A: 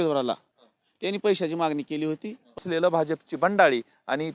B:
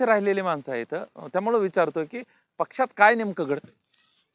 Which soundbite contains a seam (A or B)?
A